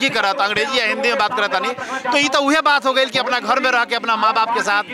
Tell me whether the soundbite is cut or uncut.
uncut